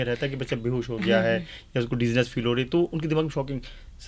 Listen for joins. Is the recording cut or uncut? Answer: uncut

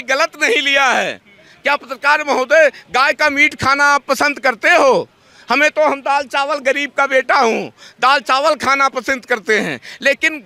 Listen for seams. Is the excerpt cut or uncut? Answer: uncut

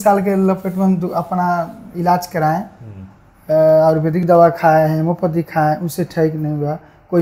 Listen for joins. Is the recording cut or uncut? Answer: uncut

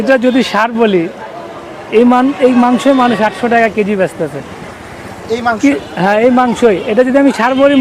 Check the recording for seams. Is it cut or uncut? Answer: uncut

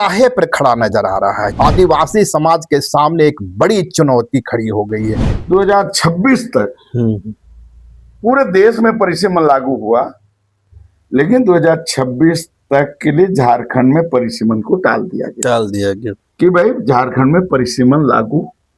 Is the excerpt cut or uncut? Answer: cut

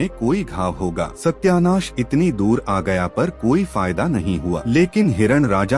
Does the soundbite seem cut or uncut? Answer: cut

